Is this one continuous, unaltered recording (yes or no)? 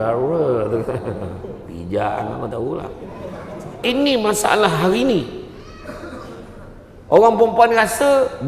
no